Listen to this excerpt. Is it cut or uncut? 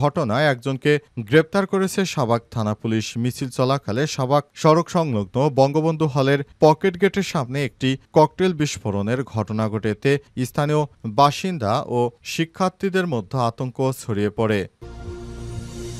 cut